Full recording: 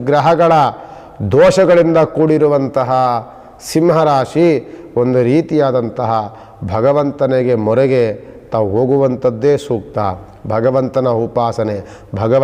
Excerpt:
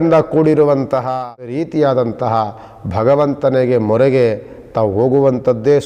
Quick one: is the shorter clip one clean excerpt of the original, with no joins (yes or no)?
no